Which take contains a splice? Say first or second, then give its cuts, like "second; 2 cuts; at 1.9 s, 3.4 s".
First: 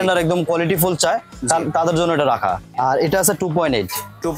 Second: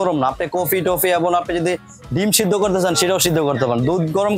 first; 1 cut; at 2.7 s